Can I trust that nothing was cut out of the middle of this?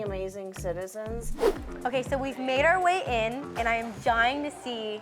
no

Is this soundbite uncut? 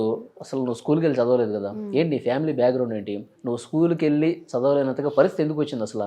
yes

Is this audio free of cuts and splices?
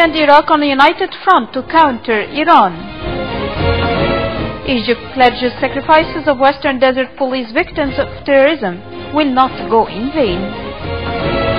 yes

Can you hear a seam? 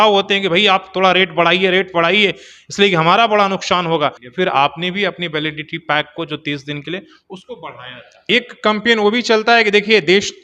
yes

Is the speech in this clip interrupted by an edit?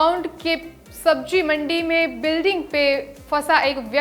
no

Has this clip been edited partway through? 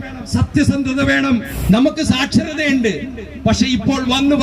yes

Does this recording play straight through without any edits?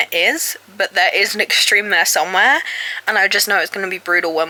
yes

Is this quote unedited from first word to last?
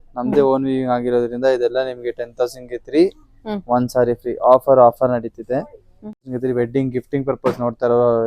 no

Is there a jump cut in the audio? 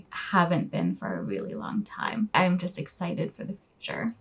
yes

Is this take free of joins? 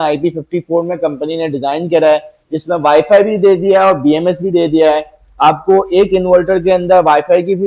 yes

